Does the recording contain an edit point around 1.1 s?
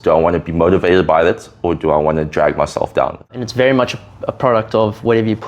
no; 1 cut; at 3.4 s

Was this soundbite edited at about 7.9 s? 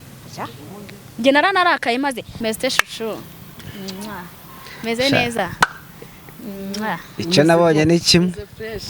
no; 1 cut; at 2.3 s

